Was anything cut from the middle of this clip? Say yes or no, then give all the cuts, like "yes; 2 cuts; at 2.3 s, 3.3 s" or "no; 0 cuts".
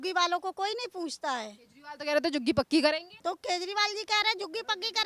yes; 1 cut; at 3.1 s